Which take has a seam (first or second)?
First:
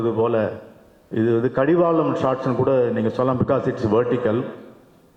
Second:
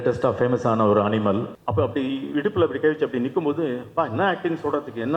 second